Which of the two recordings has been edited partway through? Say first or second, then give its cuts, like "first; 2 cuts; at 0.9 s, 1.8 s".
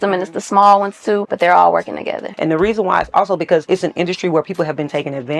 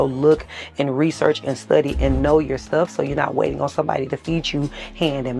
first; 3 cuts; at 1.3 s, 2.3 s, 3.6 s